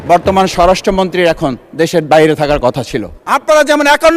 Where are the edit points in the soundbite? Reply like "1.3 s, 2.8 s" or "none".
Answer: 3.1 s

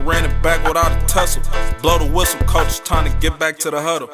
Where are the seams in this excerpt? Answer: none

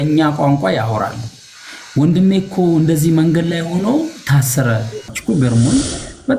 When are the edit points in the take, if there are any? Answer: 5.1 s

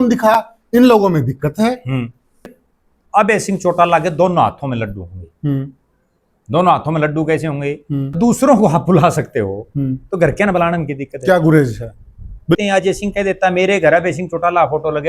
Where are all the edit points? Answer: 2.6 s, 8.2 s, 12.6 s

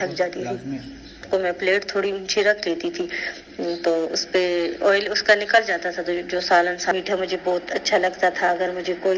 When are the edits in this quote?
1.2 s, 6.9 s

